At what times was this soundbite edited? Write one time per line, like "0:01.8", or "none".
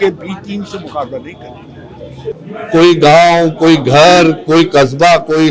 0:02.4